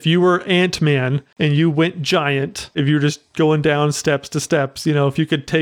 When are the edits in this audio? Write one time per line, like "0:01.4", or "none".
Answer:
0:01.2
0:02.8